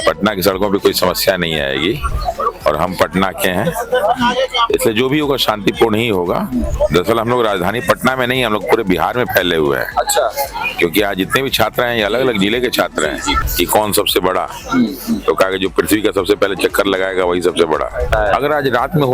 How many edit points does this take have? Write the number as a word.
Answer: four